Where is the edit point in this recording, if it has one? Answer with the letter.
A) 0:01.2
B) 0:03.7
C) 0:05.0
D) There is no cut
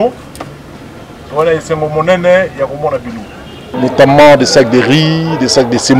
B